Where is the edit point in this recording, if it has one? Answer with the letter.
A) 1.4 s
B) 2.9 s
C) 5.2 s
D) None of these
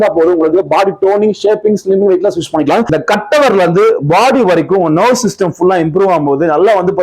B